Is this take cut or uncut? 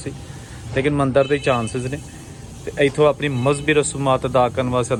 uncut